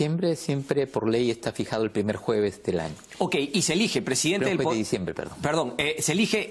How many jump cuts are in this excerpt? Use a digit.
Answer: 1